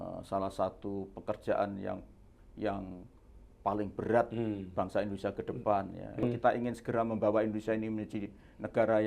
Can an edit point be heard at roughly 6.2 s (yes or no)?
yes